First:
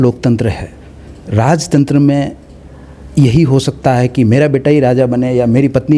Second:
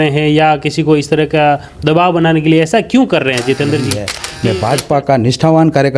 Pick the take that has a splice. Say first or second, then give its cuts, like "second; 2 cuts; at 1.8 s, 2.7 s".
second; 1 cut; at 4.1 s